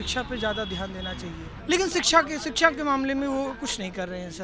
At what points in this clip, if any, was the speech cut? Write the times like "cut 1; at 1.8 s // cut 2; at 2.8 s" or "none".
cut 1; at 1.5 s